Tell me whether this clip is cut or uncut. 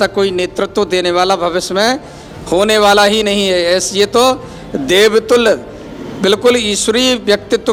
uncut